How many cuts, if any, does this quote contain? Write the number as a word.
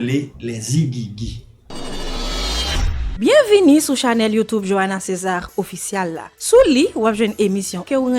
one